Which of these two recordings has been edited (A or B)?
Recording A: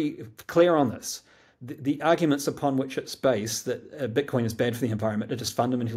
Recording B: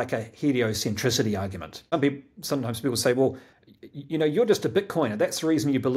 B